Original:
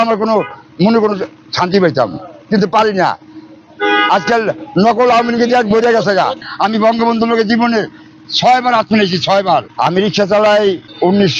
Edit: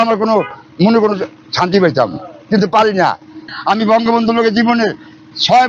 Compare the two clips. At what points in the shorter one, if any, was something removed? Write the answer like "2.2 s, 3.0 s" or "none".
3.5 s